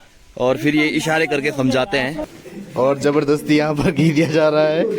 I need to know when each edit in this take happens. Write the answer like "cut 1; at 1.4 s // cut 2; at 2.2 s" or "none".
cut 1; at 2.3 s